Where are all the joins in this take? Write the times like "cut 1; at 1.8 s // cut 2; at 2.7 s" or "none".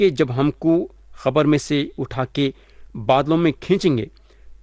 none

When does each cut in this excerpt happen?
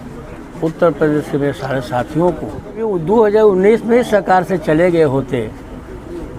cut 1; at 2.9 s

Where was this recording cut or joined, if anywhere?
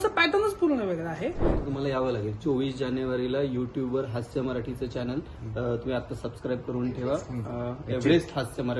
cut 1; at 1.6 s

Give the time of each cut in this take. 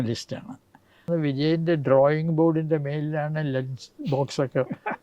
cut 1; at 1.1 s

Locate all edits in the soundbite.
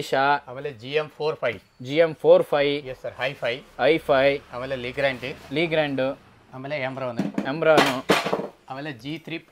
none

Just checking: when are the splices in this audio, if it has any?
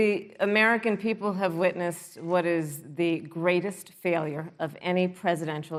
none

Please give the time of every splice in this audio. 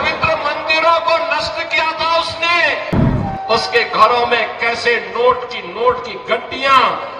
cut 1; at 3.0 s

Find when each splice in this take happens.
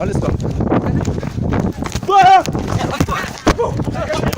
cut 1; at 3.4 s

